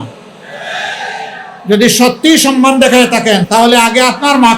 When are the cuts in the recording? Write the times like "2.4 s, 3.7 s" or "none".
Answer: 3.4 s